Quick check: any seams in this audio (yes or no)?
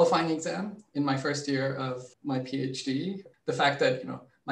yes